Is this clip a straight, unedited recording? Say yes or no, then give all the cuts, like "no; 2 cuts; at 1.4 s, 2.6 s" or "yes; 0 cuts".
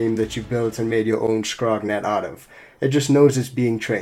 yes; 0 cuts